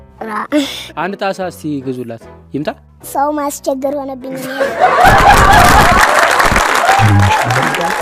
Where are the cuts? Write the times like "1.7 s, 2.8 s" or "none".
none